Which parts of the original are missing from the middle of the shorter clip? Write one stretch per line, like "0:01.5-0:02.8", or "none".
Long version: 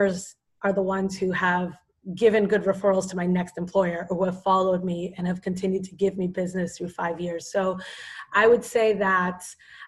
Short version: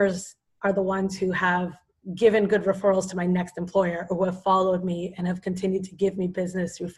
none